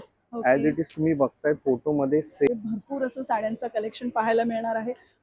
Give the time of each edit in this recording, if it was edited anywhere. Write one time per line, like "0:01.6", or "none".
0:02.5